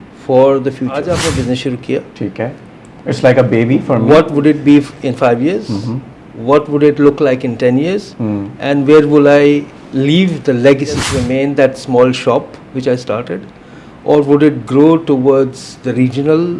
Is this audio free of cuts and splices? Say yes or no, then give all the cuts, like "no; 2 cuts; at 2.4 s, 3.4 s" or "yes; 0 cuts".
no; 2 cuts; at 1.0 s, 11.1 s